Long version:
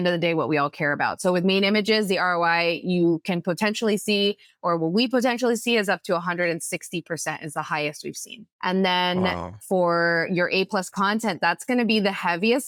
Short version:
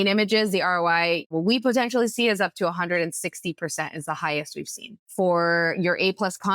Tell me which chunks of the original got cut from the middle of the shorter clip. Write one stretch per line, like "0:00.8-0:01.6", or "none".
0:02.9-0:04.8
0:08.5-0:09.5